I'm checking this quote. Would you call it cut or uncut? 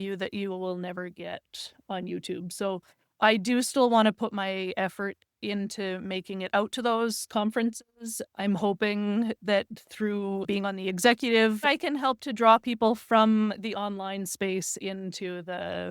cut